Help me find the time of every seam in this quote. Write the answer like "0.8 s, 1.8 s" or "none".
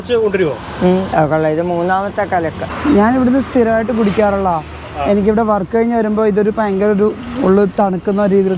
2.7 s